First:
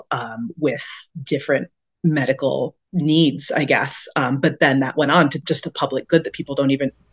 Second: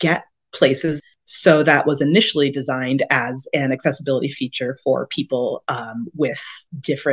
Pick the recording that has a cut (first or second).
second